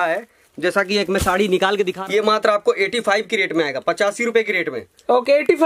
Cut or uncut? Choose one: cut